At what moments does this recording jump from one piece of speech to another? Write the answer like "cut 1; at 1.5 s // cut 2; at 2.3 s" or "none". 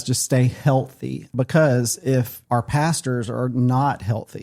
cut 1; at 1.3 s // cut 2; at 2.4 s